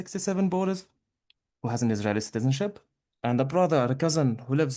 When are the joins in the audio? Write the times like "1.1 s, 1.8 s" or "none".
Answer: none